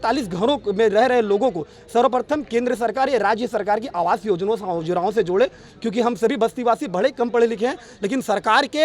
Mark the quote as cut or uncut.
uncut